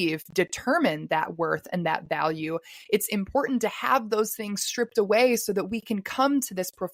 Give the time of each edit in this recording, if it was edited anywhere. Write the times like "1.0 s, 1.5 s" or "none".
none